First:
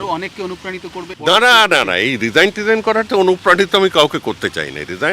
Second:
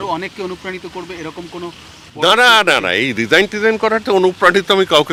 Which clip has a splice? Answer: first; 1 cut; at 1.1 s

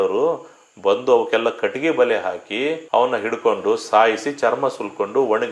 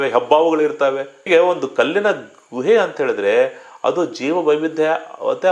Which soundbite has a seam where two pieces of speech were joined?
second; 1 cut; at 1.3 s

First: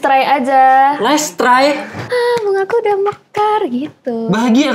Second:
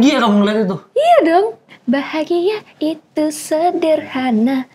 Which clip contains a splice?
first; 1 cut; at 2.0 s

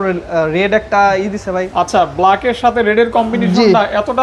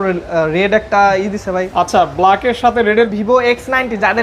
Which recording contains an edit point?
second; 1 cut; at 3.1 s

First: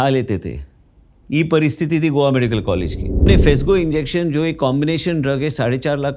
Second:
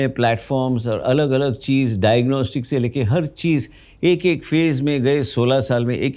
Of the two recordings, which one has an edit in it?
first; 1 cut; at 3.3 s

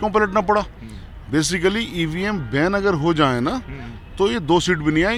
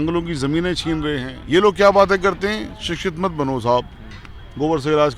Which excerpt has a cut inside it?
second; 1 cut; at 1.3 s

